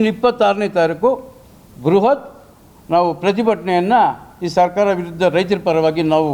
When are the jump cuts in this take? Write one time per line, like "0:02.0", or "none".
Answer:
none

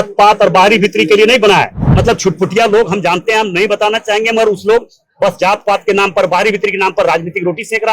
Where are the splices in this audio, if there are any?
0:01.8

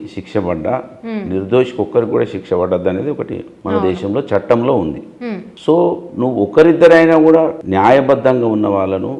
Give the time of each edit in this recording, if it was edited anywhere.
none

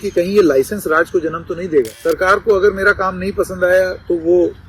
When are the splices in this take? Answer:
0:01.9

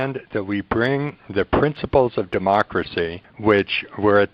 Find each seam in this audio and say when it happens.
0:03.2

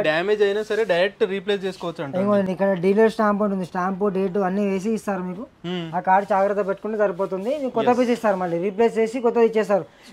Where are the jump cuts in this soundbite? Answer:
none

